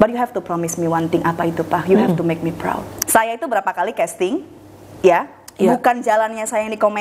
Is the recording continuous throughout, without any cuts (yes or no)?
no